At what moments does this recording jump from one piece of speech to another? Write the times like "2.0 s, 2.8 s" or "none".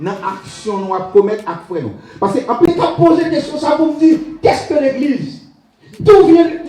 2.7 s